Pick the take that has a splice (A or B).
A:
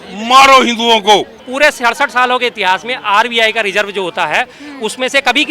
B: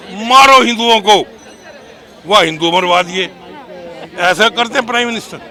A